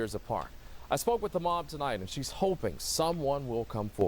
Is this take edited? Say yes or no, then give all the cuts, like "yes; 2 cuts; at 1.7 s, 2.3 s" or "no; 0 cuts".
no; 0 cuts